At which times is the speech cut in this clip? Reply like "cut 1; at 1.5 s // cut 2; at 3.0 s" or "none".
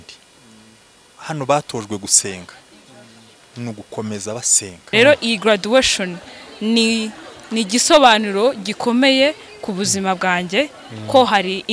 cut 1; at 4.7 s